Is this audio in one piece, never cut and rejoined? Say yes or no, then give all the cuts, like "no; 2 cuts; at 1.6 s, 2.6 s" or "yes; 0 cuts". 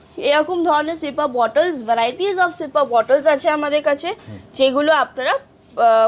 yes; 0 cuts